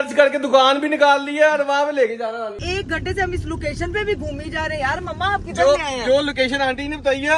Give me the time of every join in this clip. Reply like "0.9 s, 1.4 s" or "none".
2.6 s